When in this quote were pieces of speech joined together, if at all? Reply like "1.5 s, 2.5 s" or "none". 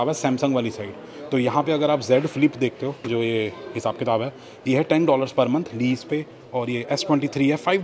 none